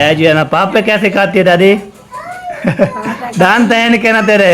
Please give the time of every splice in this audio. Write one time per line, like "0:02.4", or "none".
0:02.5